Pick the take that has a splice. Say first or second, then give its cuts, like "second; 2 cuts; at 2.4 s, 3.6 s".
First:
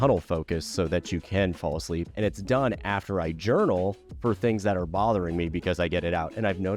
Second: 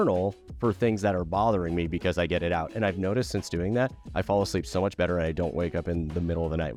first; 1 cut; at 2.1 s